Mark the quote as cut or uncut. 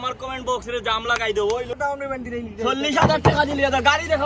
cut